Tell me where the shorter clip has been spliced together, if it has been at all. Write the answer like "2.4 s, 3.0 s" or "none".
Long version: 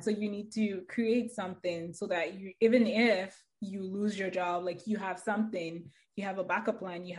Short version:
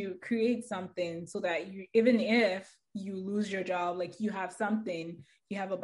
none